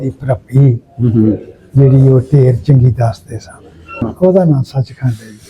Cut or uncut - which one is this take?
cut